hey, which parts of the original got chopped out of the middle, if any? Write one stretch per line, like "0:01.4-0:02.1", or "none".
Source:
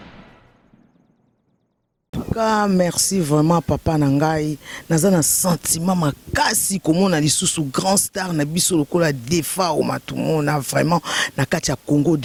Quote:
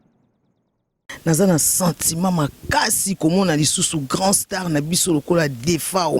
0:02.1-0:04.7